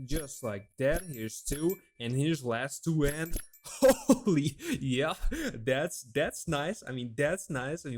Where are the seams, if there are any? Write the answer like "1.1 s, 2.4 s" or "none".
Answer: none